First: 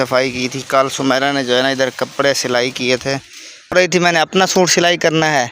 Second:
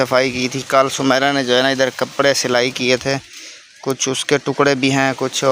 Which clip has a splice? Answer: first; 1 cut; at 3.7 s

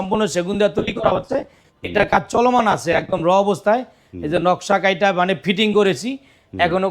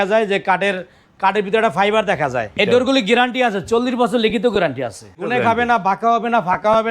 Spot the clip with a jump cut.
second; 2 cuts; at 2.5 s, 5.1 s

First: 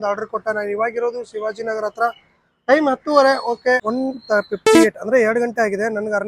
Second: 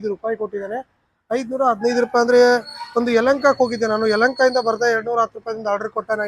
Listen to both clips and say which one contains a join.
first; 1 cut; at 3.8 s

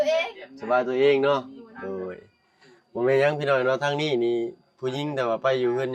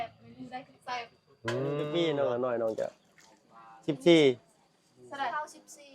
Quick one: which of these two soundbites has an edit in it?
second; 1 cut; at 1.9 s

